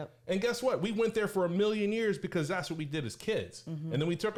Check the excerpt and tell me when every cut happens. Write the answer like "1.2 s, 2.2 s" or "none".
none